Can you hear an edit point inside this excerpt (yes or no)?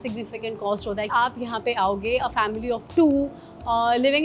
yes